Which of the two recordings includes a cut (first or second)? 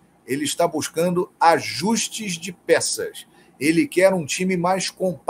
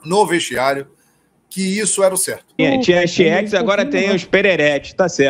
second